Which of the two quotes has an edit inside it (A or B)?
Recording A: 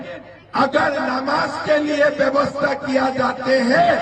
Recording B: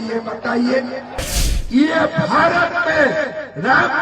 B